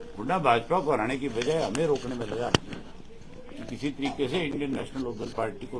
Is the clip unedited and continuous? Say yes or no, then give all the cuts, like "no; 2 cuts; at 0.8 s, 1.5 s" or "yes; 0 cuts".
yes; 0 cuts